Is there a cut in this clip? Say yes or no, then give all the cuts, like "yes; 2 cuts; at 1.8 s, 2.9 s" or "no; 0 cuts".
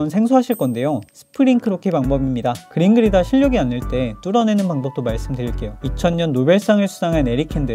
yes; 1 cut; at 2.6 s